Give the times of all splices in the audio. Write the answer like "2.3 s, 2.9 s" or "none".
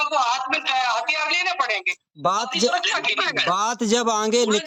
none